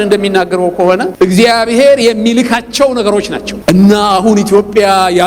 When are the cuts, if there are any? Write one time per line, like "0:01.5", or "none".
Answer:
0:01.1
0:03.5